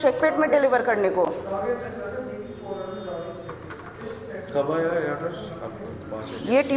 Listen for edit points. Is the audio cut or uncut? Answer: uncut